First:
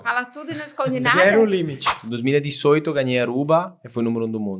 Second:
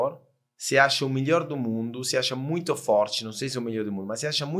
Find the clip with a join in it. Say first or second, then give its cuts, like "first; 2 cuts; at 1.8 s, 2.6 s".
first; 1 cut; at 2.0 s